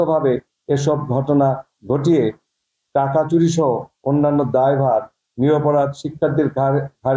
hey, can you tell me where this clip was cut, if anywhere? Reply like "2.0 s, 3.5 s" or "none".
none